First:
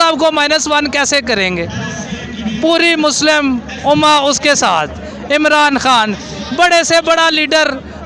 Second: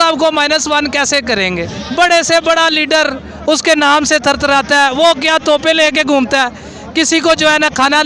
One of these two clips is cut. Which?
second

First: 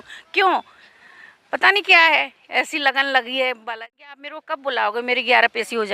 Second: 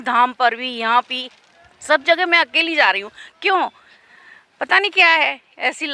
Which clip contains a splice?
first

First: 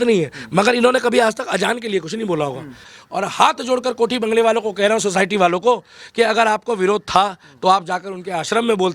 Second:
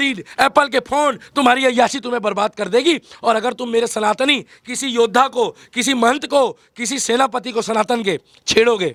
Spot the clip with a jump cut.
first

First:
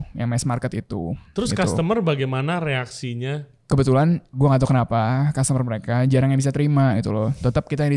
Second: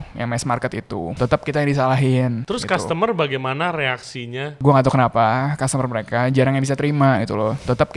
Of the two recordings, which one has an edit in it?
second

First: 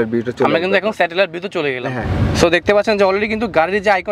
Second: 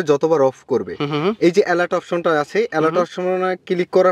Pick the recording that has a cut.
first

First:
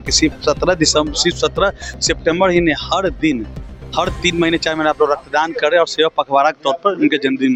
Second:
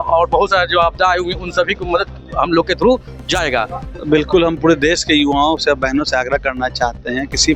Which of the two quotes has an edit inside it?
second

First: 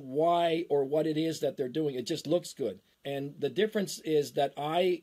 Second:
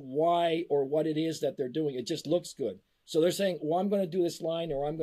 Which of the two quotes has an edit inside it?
first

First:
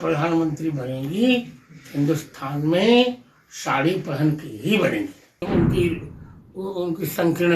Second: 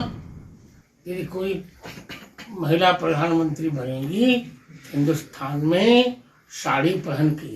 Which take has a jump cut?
first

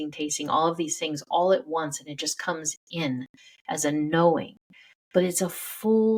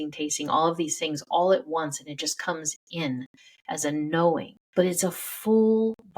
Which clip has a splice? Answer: second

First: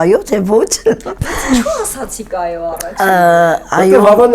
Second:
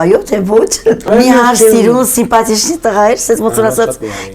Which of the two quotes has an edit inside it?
second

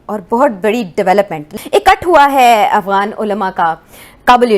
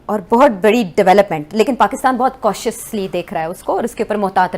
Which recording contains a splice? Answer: first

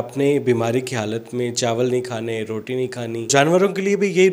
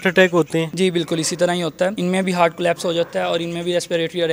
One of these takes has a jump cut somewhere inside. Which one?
first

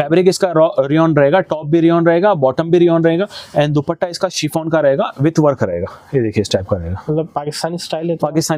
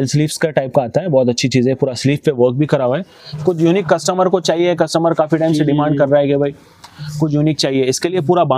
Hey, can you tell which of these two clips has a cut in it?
second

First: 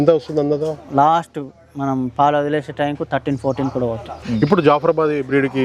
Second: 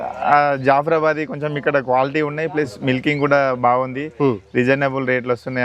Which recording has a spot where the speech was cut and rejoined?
first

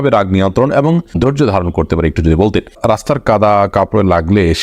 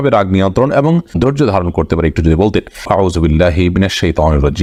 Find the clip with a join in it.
first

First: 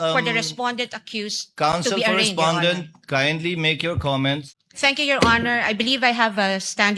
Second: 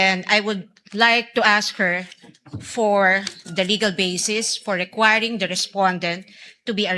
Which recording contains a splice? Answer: first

